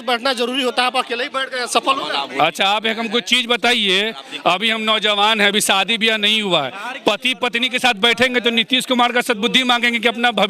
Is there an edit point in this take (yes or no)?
no